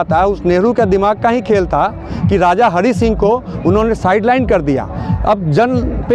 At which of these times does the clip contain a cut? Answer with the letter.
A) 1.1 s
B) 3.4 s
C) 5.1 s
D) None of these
C